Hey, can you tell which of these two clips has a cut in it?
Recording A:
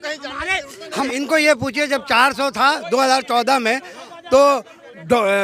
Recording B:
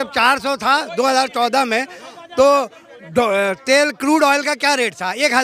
A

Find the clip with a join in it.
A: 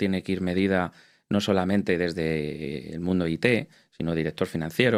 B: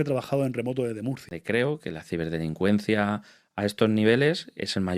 B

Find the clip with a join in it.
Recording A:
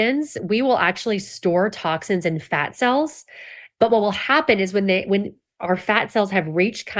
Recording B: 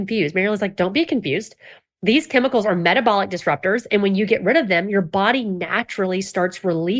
A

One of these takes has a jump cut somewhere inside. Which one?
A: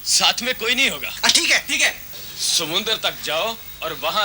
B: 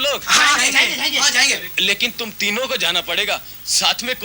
A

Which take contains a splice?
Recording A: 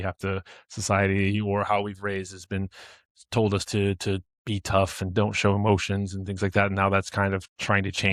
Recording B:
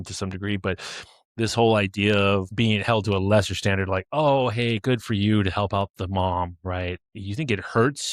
B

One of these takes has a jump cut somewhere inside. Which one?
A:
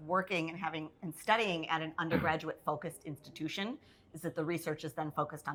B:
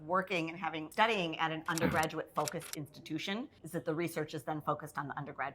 B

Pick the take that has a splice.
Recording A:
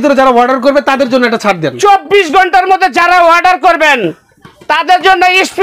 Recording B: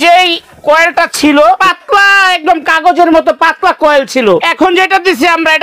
B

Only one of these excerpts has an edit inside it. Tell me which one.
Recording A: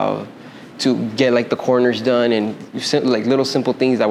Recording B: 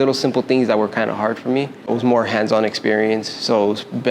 B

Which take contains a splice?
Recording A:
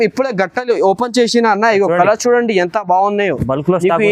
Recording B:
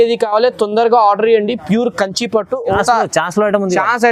B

